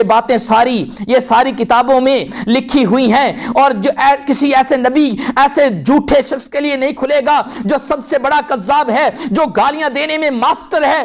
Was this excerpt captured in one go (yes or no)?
yes